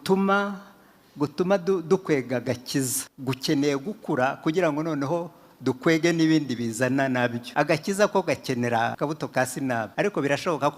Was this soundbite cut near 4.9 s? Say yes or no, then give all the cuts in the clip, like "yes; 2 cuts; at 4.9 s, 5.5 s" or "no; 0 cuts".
no; 4 cuts; at 3.1 s, 7.4 s, 8.9 s, 9.9 s